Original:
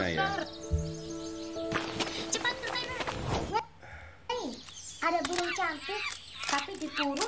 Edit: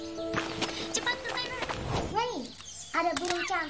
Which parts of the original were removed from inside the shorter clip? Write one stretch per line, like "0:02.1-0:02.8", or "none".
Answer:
0:03.6-0:04.3